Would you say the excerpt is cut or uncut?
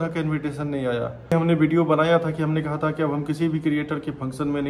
cut